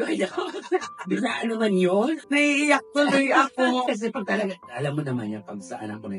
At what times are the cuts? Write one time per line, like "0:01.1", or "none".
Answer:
0:02.2
0:03.9